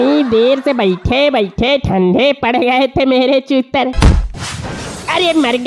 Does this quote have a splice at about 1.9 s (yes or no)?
no